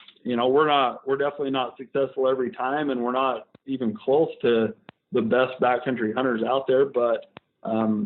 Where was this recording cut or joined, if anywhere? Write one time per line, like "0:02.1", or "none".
none